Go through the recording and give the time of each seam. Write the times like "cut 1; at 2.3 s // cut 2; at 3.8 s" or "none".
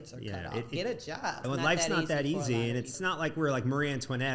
cut 1; at 1.4 s // cut 2; at 3.0 s